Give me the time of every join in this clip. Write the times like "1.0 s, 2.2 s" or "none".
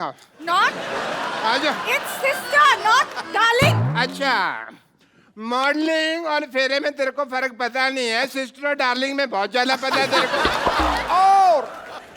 11.0 s